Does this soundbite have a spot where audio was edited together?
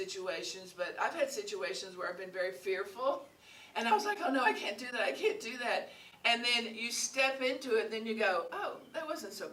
no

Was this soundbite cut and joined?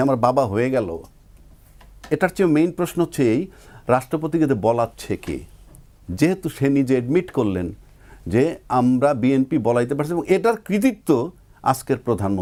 no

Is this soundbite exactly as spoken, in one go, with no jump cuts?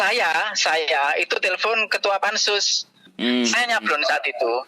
no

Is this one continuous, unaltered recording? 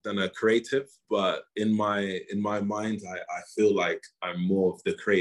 yes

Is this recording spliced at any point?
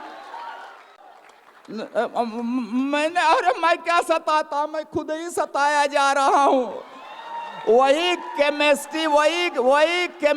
yes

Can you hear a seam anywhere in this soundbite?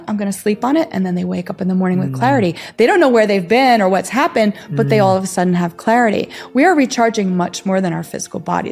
no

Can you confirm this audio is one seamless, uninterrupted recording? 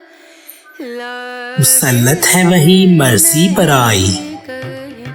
yes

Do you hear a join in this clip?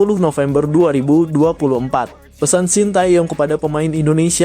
yes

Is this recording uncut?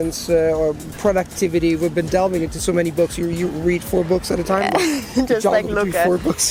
yes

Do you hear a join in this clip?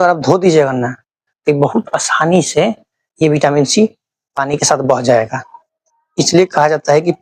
no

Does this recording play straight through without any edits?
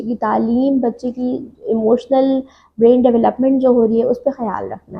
yes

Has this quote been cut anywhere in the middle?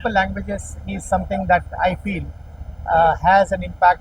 no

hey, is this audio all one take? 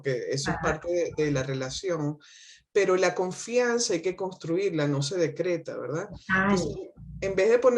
yes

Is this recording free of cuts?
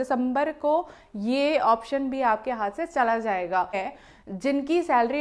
no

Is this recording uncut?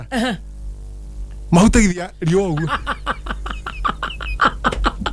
yes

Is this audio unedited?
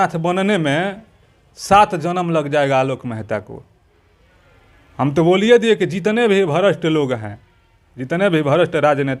yes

